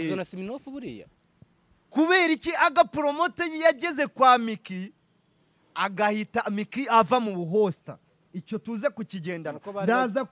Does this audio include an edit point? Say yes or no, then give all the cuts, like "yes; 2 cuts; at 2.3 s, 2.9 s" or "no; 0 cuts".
yes; 1 cut; at 1.1 s